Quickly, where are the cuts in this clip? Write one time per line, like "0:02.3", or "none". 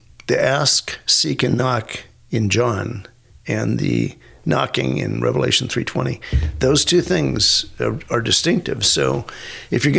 none